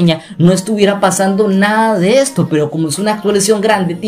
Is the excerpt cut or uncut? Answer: uncut